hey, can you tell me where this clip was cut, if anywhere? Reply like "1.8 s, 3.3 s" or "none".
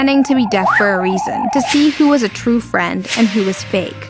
none